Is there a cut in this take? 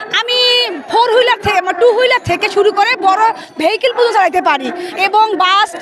no; 0 cuts

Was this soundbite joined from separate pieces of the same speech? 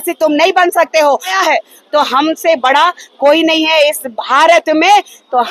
yes; 1 cut; at 1.3 s

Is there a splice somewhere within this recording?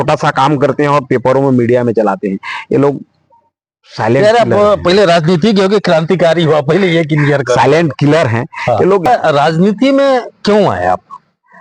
yes; 1 cut; at 9.0 s

